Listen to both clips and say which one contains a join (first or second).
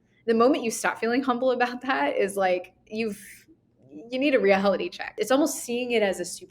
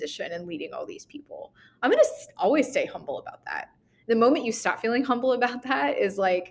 first